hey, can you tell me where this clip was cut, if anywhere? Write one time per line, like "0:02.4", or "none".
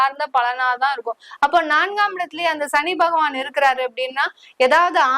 none